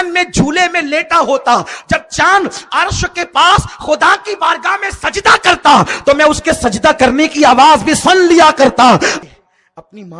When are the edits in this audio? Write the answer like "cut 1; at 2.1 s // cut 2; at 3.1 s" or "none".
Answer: cut 1; at 9.2 s